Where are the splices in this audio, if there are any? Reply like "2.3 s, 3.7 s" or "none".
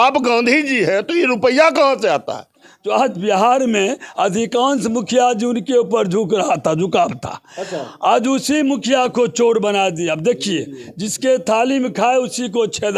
2.7 s